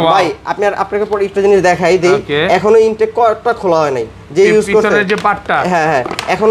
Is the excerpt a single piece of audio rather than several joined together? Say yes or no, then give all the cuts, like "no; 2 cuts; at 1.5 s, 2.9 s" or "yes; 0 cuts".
yes; 0 cuts